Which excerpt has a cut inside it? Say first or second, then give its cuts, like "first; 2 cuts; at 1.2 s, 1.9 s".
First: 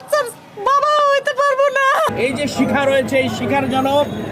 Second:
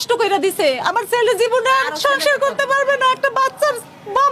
first; 1 cut; at 2.1 s